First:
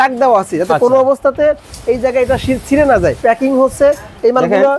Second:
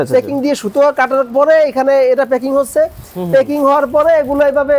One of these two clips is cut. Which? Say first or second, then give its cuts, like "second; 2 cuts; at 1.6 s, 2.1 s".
first; 1 cut; at 3.2 s